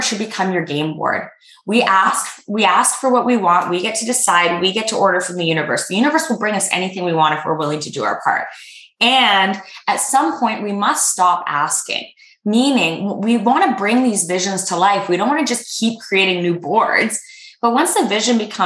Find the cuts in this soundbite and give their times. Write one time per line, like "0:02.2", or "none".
none